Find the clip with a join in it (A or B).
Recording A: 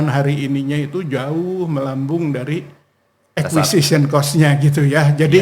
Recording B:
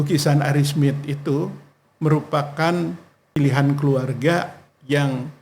B